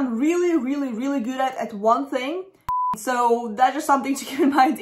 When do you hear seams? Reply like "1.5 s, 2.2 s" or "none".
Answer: 2.8 s